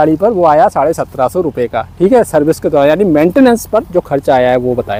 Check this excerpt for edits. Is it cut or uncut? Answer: uncut